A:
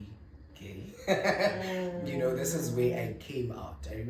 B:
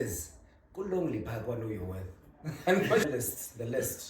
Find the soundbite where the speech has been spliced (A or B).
B